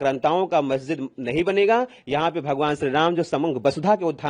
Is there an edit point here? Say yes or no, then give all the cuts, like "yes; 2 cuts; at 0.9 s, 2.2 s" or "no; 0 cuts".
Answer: no; 0 cuts